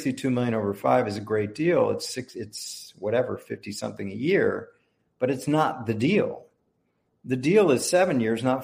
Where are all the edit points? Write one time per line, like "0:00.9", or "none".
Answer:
none